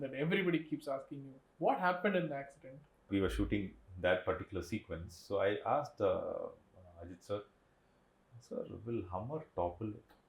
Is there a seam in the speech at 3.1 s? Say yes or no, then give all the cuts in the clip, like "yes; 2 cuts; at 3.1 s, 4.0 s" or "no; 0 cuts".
yes; 1 cut; at 3.1 s